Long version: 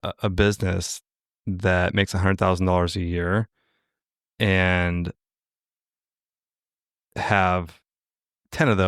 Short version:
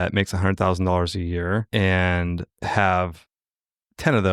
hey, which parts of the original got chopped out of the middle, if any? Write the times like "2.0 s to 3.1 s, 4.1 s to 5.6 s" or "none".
3.5 s to 4.3 s, 5.2 s to 7.0 s